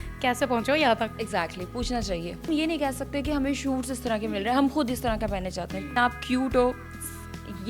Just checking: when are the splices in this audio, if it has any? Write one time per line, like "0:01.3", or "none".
0:02.3
0:05.9